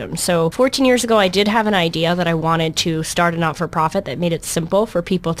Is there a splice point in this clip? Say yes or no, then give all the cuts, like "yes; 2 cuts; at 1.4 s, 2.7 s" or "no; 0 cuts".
yes; 1 cut; at 3.8 s